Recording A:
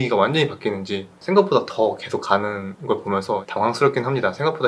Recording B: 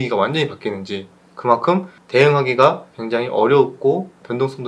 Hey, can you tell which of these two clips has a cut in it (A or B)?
A